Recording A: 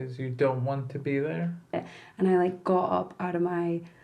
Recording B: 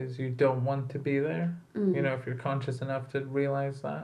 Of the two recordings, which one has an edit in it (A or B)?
A